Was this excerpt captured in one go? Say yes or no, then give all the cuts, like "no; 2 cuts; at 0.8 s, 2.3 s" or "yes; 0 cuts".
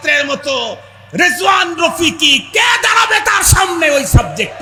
yes; 0 cuts